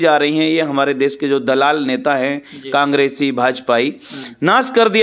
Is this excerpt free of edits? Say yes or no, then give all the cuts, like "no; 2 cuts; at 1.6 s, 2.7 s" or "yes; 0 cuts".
yes; 0 cuts